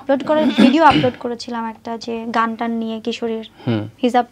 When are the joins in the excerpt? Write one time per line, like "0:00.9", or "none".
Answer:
none